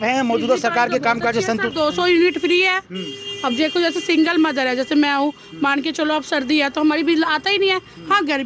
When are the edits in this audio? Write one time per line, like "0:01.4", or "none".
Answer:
none